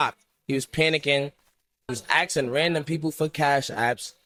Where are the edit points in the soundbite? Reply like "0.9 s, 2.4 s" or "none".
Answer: none